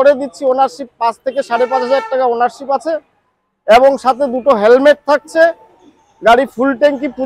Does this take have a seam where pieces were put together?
no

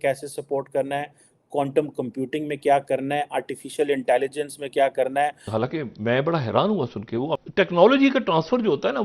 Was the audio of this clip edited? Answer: yes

